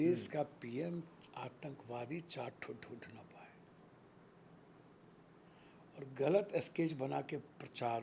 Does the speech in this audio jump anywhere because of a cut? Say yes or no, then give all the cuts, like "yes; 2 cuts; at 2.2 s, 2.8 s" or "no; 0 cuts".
no; 0 cuts